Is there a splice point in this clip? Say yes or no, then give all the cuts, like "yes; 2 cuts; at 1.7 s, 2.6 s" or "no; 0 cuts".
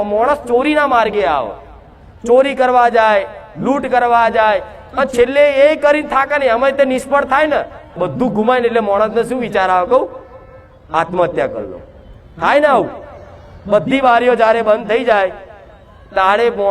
yes; 1 cut; at 7.9 s